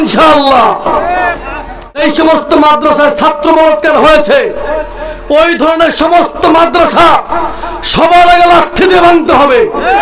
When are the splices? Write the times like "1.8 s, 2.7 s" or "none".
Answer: 2.0 s